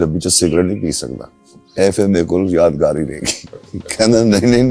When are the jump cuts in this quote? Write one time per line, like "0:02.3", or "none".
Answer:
none